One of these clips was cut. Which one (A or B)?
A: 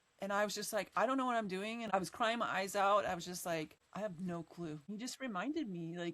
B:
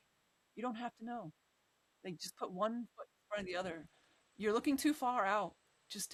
A